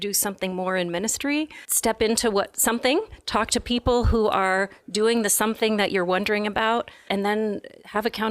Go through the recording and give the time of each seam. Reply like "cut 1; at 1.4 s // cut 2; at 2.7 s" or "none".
cut 1; at 1.6 s // cut 2; at 7.0 s